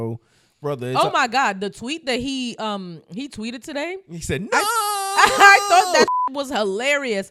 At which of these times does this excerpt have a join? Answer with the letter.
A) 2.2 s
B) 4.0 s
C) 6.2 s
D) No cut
D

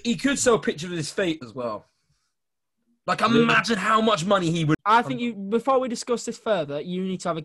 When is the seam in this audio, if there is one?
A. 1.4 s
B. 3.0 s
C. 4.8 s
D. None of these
C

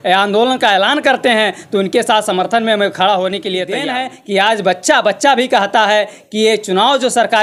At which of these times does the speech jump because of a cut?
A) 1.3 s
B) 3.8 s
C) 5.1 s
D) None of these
B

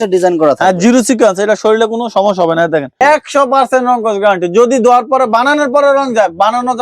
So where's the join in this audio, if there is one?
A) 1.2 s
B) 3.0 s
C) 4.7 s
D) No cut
B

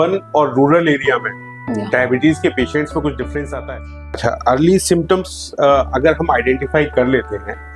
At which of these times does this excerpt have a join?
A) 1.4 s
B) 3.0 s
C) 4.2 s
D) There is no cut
C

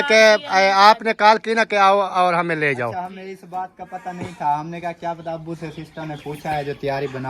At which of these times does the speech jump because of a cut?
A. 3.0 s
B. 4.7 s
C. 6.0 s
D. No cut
D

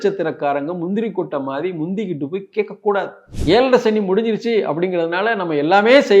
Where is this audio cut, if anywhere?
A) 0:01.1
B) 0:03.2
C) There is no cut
B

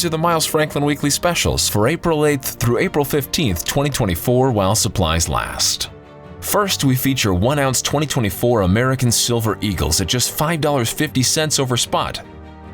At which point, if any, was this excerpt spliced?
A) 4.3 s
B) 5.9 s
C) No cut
C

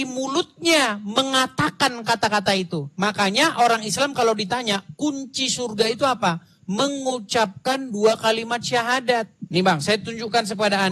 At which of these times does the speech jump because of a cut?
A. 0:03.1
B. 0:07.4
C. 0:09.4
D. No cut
C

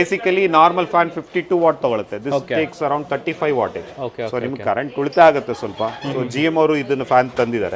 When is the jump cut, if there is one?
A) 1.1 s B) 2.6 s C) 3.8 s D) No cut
D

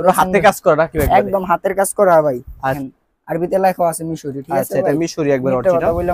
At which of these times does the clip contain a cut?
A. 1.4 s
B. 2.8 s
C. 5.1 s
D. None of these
B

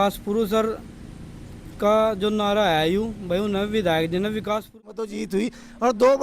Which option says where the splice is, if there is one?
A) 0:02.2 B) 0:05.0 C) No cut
B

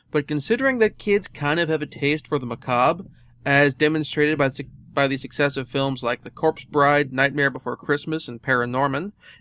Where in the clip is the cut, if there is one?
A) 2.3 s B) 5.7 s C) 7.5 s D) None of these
C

